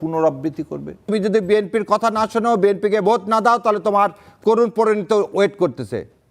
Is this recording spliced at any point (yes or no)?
yes